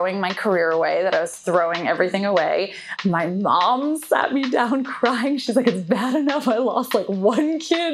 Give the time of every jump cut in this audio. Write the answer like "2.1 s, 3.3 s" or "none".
2.9 s